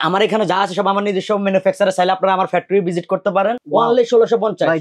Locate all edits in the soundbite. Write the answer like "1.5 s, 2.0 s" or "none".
3.6 s